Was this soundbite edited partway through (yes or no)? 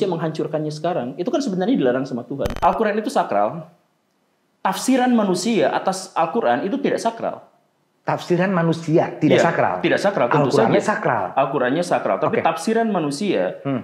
yes